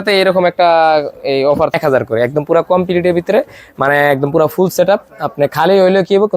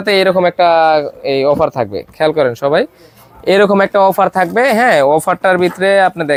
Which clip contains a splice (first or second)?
first